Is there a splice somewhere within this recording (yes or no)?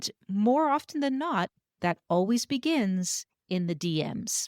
yes